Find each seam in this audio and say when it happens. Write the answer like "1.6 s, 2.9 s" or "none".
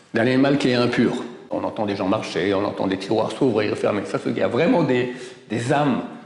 1.5 s